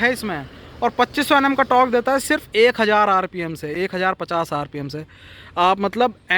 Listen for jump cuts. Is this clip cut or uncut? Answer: uncut